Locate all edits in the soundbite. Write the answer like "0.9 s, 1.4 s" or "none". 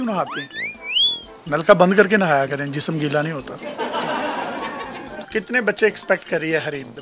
5.2 s

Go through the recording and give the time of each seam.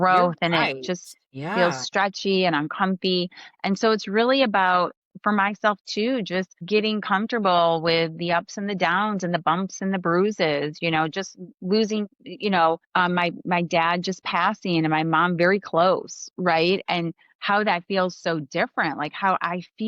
6.6 s, 12.9 s

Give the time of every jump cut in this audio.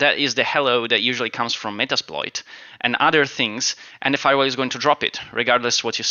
none

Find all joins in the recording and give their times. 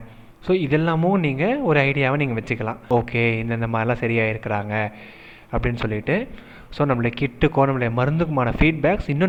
none

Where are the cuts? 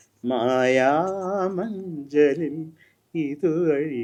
none

